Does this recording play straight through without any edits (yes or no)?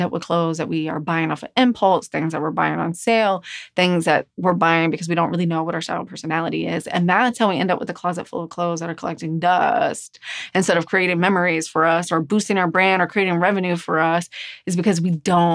yes